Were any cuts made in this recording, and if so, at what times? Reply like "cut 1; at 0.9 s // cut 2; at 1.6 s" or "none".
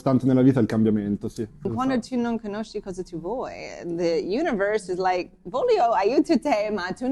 cut 1; at 1.6 s